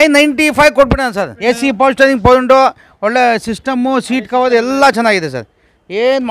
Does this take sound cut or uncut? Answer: cut